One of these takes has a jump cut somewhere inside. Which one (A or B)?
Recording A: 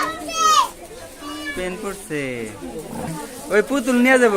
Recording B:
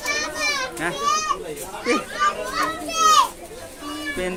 A